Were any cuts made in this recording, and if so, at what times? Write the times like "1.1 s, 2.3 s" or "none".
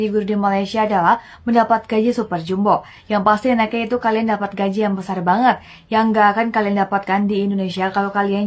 none

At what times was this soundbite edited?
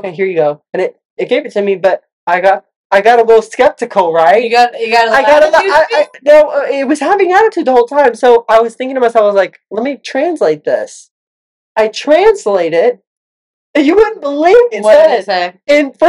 14.7 s

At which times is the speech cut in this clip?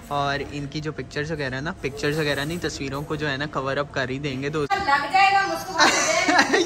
4.8 s

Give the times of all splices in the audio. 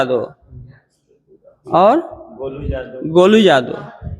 none

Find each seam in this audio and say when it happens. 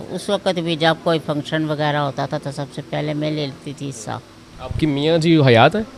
none

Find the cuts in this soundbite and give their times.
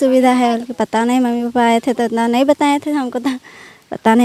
none

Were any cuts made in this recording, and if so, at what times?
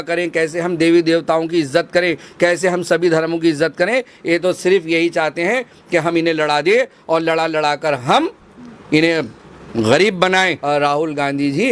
10.6 s

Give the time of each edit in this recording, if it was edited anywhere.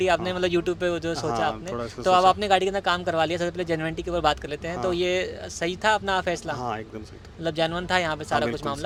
none

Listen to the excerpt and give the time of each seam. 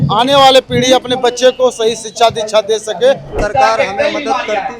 3.3 s

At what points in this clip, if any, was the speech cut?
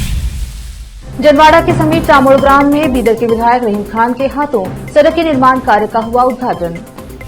0.9 s

